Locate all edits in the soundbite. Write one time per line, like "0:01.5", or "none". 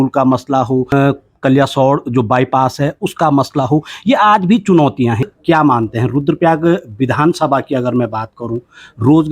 0:00.9
0:05.3